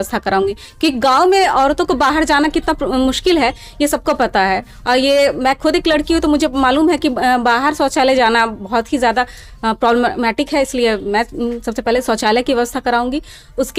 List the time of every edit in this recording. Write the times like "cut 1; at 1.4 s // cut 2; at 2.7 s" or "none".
none